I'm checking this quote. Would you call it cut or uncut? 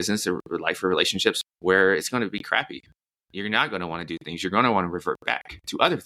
cut